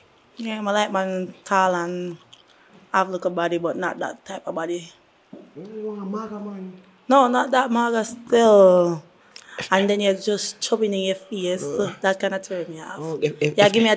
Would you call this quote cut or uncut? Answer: uncut